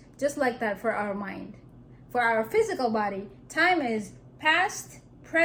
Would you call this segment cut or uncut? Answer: uncut